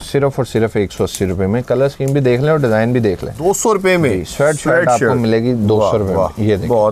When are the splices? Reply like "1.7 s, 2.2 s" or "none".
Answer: 3.3 s